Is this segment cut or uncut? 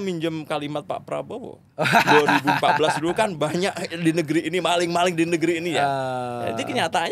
uncut